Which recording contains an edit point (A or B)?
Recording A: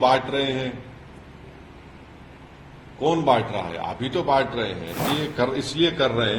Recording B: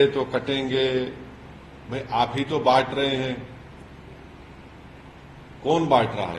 A